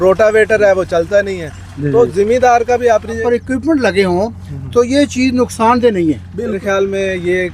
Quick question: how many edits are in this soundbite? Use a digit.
2